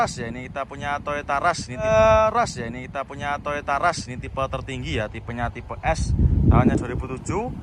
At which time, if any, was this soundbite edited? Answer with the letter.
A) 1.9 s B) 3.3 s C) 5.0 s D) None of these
A